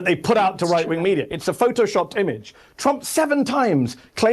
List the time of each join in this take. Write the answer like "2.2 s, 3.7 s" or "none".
none